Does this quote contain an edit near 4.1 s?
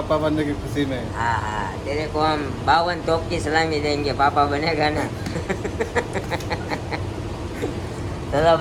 no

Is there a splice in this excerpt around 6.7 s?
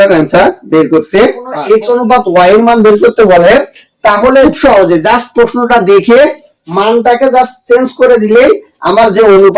no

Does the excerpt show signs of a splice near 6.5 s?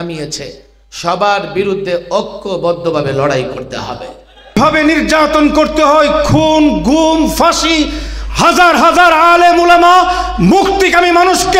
no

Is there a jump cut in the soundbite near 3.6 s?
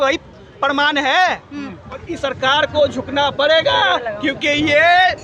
no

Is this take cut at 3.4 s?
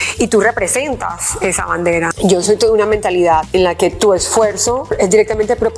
yes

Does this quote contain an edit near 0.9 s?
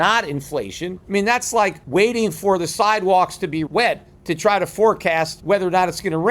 yes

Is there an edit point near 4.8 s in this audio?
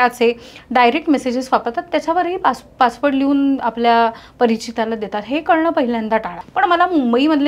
no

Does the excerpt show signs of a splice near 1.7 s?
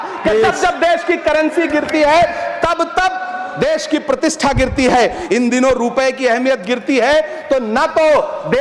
no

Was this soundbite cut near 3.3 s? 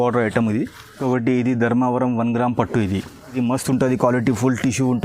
yes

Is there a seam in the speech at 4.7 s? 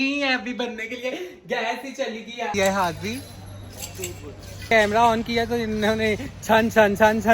yes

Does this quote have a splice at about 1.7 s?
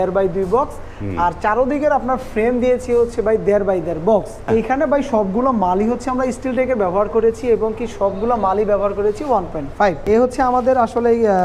no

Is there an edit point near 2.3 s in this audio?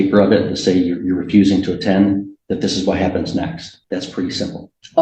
no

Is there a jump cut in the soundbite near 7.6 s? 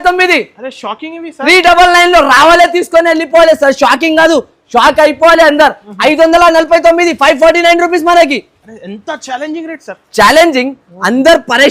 no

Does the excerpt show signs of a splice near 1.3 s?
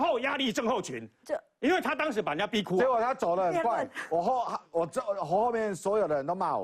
no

